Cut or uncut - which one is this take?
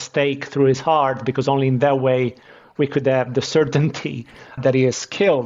cut